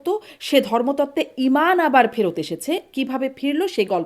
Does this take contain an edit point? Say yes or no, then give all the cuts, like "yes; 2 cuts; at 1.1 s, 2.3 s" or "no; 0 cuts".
no; 0 cuts